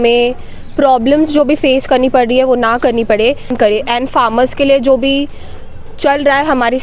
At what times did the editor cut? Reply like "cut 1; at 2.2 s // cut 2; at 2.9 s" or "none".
cut 1; at 3.5 s